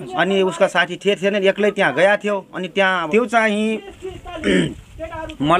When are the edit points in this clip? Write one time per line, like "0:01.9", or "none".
0:03.0